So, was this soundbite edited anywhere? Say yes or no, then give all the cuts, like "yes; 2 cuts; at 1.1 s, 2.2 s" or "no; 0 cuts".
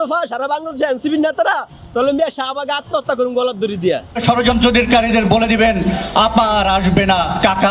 yes; 1 cut; at 4.2 s